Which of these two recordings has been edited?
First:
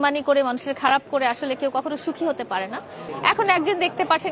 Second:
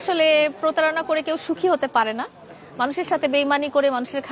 first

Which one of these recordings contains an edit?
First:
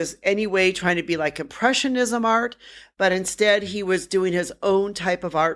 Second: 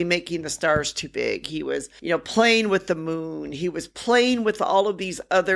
second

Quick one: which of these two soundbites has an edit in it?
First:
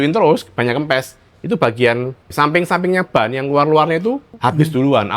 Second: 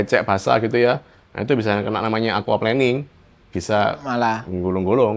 first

